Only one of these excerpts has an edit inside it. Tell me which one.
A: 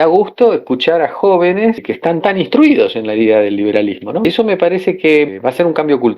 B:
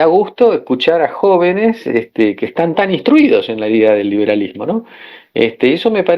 A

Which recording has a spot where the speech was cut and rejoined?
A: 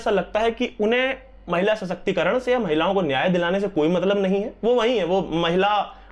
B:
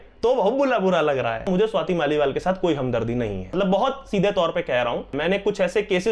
B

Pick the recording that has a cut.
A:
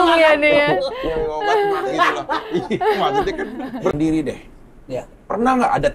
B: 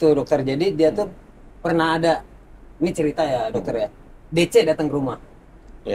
A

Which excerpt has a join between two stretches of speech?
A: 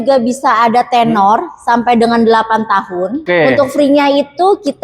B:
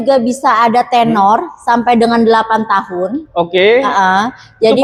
A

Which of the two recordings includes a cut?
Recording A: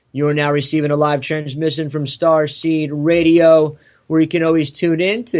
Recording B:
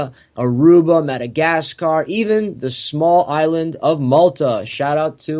B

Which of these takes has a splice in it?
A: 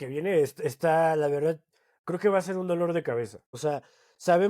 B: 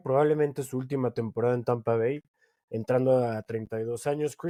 A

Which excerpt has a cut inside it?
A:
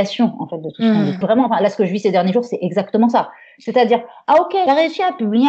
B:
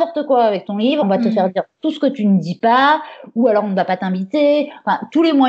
A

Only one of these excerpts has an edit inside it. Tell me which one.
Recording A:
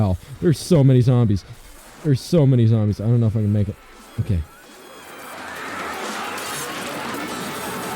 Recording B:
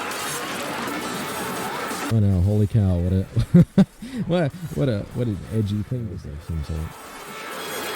B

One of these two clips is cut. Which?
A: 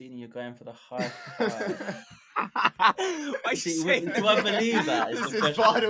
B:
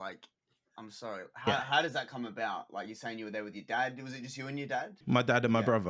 B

